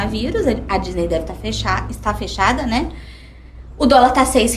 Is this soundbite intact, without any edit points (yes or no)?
yes